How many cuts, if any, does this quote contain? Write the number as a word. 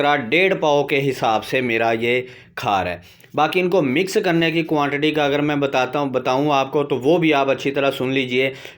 zero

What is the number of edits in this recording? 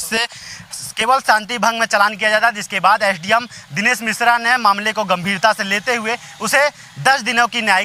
zero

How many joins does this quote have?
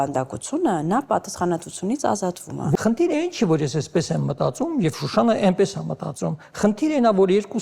one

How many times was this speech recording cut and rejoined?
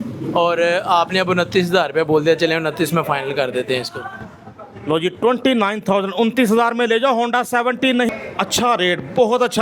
one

